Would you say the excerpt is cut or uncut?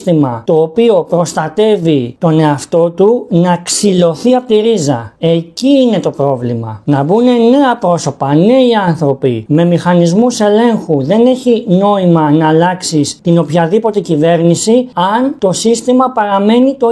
uncut